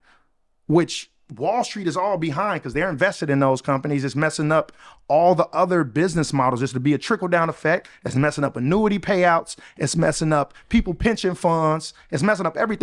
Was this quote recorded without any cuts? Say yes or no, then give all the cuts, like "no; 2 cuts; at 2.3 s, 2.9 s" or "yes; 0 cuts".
yes; 0 cuts